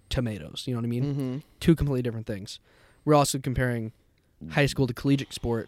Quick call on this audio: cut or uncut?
uncut